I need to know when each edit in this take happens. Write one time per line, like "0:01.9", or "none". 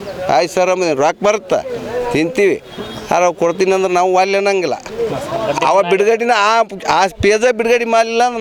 none

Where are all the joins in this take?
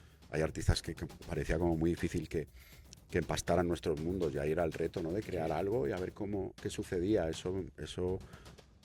none

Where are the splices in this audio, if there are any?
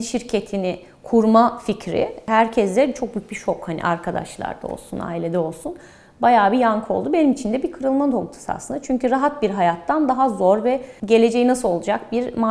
0:02.2
0:10.9

